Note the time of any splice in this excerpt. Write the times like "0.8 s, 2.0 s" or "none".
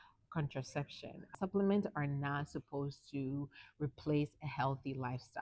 1.4 s

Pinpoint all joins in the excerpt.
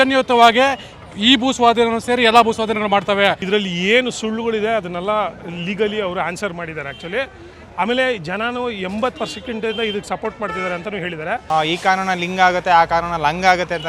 3.4 s, 11.4 s

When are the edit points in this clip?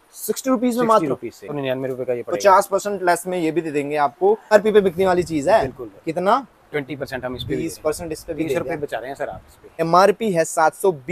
1.5 s, 4.5 s, 9.8 s

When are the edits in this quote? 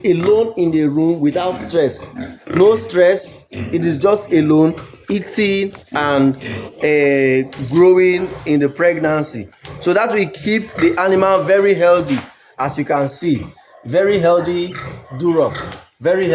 none

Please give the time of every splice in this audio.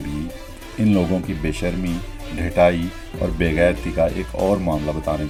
none

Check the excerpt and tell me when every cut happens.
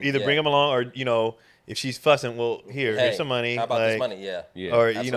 none

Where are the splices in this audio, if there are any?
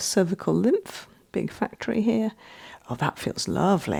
none

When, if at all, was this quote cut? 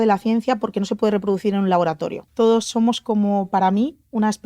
2.2 s

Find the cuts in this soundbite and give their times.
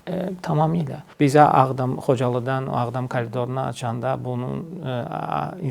1.0 s

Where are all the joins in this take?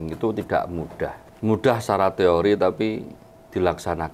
1.2 s

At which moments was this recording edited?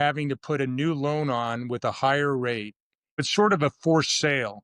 3.2 s

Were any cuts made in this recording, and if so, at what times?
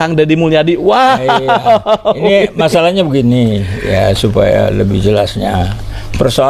none

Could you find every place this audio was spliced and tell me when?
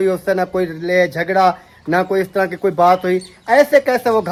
none

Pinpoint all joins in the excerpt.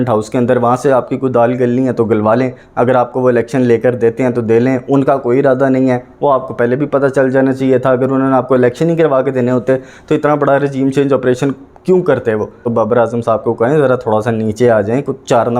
12.6 s

